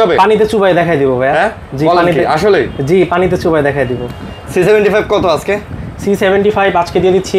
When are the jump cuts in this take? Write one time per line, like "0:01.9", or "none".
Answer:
none